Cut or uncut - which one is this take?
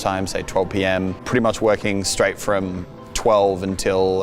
cut